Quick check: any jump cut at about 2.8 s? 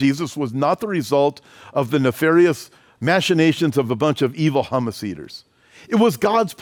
no; 0 cuts

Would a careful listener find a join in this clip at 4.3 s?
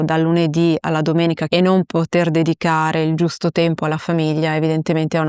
no; 1 cut; at 1.5 s

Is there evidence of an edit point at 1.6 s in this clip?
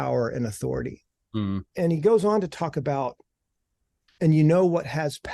yes; 1 cut; at 1.6 s

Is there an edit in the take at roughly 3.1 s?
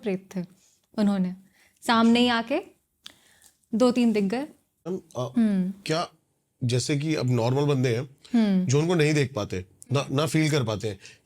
no; 1 cut; at 5.0 s

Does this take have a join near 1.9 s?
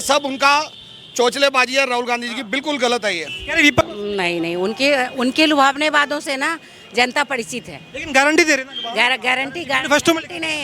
no; 1 cut; at 3.8 s

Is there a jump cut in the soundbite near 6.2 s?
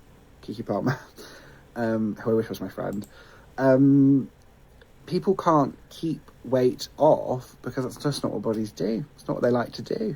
no; 1 cut; at 8.7 s

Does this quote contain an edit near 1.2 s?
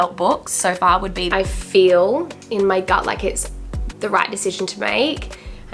yes; 1 cut; at 1.2 s

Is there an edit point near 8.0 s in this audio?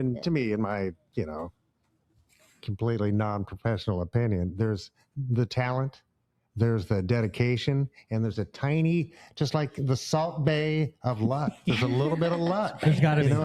no; 0 cuts

